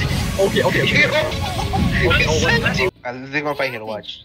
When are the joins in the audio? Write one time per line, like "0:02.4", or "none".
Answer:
0:03.0